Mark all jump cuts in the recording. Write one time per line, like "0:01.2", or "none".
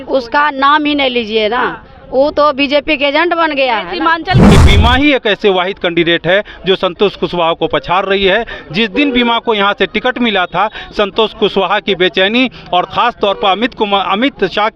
0:04.4